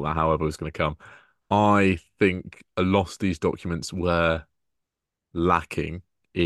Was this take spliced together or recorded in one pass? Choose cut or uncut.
uncut